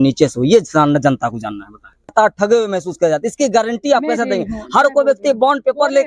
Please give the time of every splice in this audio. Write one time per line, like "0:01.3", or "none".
0:02.1